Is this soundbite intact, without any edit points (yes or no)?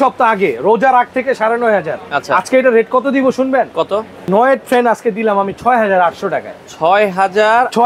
no